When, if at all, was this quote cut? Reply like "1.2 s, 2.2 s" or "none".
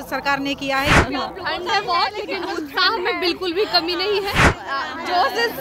1.0 s, 4.5 s